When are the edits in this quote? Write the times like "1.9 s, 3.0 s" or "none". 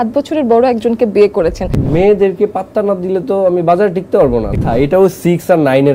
1.8 s, 4.5 s